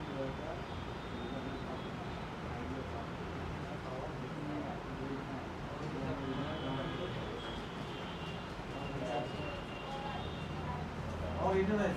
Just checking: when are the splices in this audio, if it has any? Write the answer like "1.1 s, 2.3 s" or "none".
none

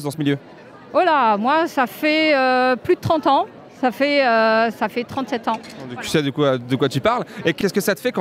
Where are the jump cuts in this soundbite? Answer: none

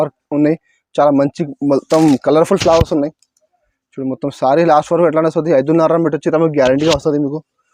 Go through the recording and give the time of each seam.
none

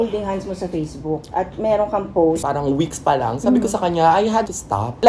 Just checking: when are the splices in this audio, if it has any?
2.4 s

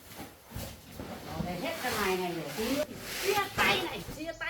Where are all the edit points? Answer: 2.7 s

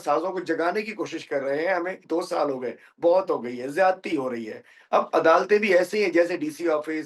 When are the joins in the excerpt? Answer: 2.0 s, 4.7 s

